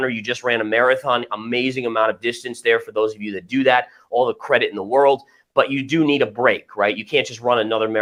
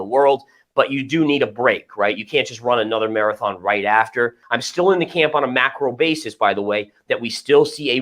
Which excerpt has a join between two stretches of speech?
second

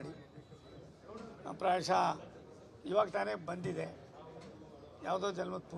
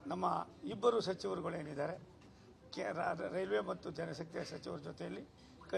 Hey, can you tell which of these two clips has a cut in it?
second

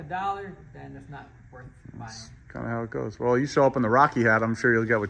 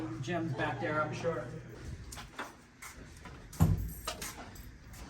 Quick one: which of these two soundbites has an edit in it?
second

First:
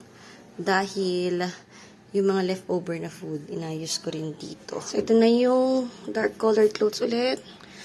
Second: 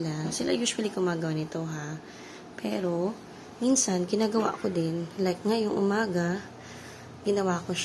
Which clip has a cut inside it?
first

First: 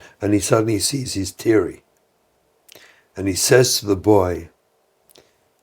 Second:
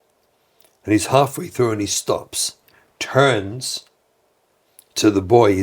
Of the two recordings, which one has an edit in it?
second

